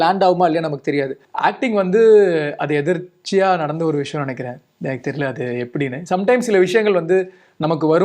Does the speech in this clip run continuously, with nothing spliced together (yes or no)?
no